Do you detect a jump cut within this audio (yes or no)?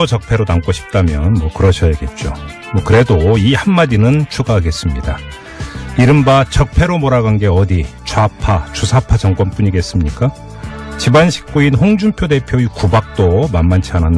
yes